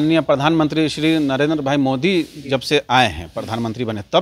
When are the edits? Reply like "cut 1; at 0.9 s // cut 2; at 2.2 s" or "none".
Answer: none